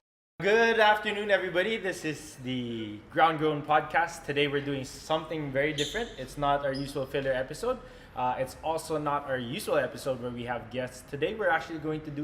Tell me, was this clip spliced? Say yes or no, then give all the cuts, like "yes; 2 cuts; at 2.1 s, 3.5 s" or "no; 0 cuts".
no; 0 cuts